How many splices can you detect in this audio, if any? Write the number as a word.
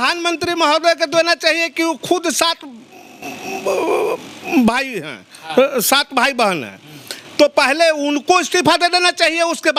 zero